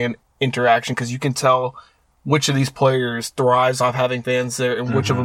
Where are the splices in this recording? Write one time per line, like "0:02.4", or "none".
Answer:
none